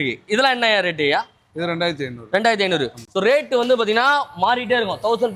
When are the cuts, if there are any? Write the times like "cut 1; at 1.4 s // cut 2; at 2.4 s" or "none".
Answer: none